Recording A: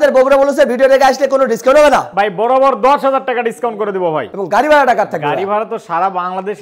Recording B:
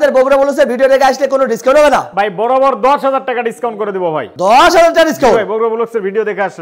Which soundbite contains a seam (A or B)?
A